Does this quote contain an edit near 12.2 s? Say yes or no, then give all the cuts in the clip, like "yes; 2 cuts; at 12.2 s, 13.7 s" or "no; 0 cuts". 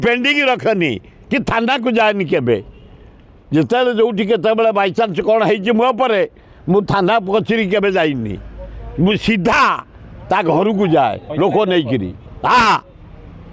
yes; 1 cut; at 12.2 s